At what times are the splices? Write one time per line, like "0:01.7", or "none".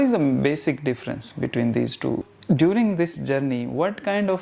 0:02.3